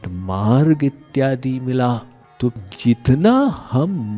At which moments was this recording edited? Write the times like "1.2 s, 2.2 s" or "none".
2.6 s